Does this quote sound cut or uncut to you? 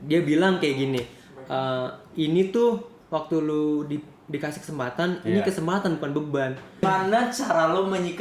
cut